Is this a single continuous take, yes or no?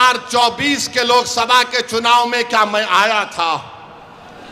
yes